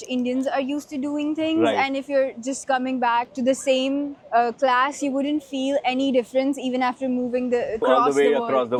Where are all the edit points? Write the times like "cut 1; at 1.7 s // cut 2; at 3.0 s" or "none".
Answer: none